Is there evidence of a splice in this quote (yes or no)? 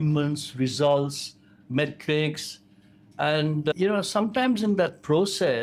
no